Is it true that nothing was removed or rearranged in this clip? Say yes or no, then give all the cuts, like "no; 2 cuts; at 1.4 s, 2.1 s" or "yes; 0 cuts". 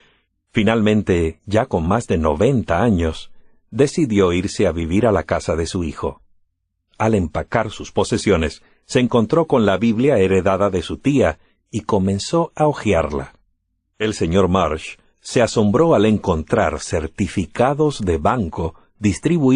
yes; 0 cuts